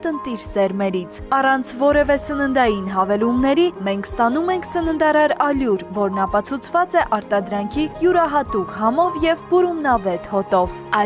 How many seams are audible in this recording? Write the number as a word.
zero